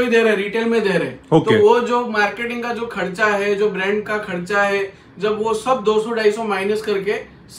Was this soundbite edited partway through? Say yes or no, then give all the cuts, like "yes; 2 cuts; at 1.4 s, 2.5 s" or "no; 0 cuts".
no; 0 cuts